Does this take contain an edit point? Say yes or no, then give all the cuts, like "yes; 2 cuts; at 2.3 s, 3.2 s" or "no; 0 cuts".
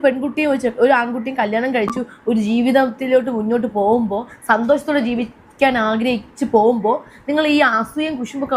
no; 0 cuts